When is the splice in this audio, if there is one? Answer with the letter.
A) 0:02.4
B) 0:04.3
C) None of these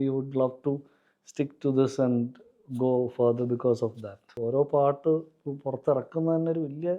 B